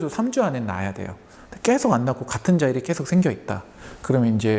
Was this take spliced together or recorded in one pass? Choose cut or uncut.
uncut